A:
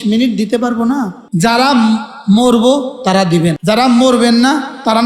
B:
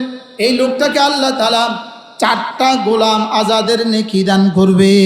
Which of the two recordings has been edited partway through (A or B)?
A